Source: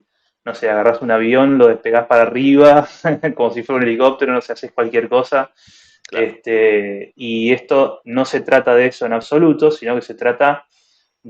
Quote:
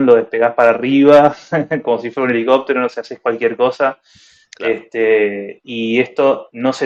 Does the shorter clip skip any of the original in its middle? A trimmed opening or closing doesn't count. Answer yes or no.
no